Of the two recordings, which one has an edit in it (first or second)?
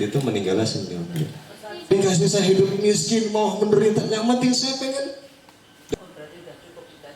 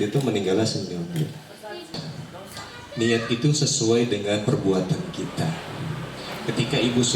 first